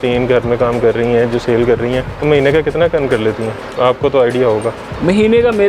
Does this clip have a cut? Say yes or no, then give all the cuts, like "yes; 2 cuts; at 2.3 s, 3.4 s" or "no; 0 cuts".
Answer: yes; 1 cut; at 2.1 s